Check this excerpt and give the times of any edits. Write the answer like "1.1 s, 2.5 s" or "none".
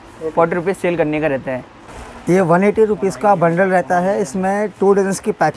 1.9 s